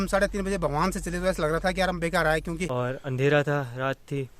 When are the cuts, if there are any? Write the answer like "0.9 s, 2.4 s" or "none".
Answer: 2.6 s